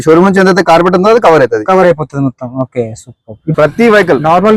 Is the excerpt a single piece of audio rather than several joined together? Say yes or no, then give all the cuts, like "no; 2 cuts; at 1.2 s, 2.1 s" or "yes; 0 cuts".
no; 1 cut; at 3.5 s